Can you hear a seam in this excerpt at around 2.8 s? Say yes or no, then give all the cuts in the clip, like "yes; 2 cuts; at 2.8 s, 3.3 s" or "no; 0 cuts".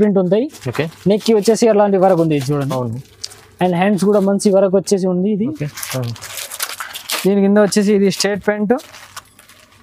no; 0 cuts